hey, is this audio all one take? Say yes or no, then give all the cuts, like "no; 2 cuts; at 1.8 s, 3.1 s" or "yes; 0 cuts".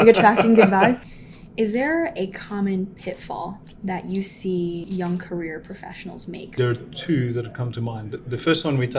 no; 4 cuts; at 1.1 s, 3.6 s, 4.8 s, 6.5 s